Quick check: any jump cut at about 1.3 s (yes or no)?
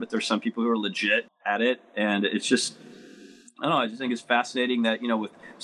yes